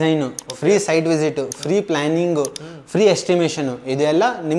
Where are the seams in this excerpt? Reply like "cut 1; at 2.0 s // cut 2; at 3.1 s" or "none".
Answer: none